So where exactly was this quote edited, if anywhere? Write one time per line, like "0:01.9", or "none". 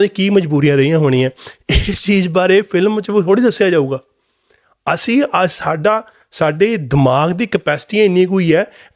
none

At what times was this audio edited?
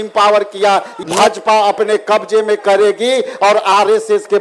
0:00.9

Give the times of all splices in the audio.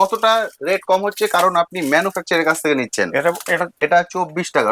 0:03.7

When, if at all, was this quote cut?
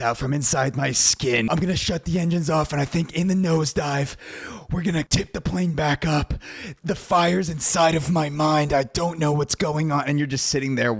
0:01.5
0:05.1
0:06.7

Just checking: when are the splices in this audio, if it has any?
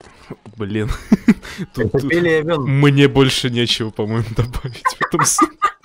none

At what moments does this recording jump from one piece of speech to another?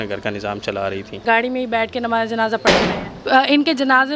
0:01.2
0:03.1

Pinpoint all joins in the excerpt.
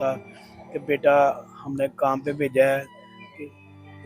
none

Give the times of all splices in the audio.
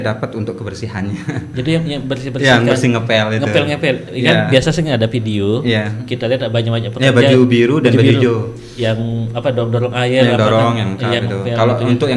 none

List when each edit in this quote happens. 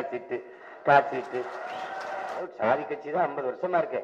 0:02.4

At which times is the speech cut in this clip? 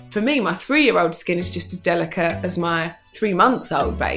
0:03.1

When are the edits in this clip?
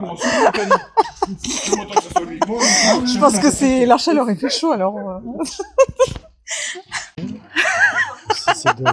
0:07.1

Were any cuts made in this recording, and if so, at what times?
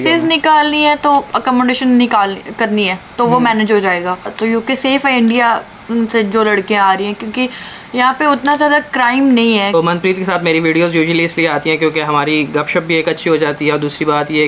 0:04.3
0:09.7

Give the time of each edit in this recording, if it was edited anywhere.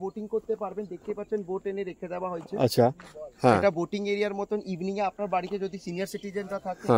none

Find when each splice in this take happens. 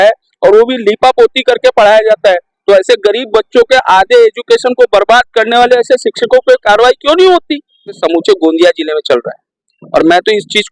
0:08.0

